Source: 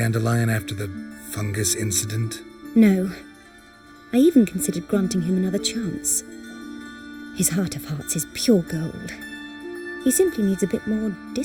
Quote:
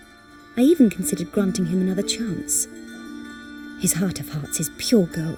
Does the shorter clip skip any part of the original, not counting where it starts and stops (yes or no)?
no